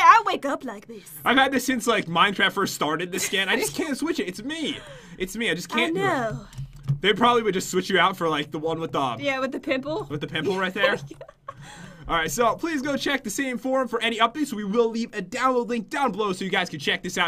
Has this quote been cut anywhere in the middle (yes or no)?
yes